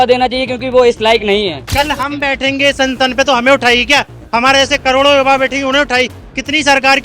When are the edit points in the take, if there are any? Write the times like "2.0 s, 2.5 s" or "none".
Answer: 1.6 s